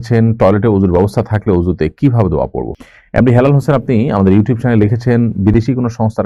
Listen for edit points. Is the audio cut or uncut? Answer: cut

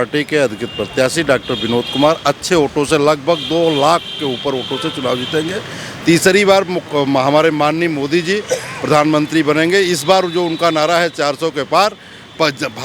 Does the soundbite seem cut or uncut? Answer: uncut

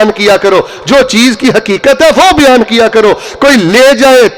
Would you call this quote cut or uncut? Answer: uncut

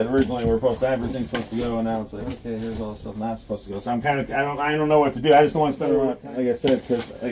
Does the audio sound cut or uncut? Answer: cut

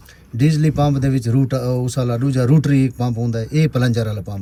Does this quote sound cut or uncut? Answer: uncut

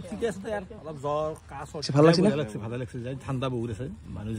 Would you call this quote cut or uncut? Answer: cut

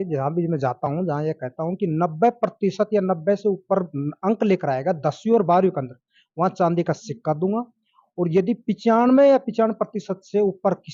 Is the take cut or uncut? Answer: uncut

